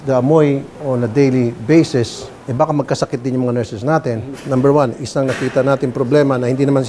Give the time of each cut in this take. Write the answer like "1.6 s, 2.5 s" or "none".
4.4 s